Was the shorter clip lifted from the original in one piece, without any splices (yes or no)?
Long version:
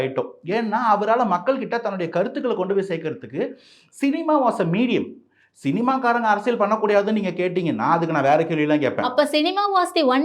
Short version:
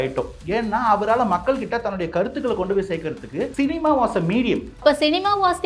no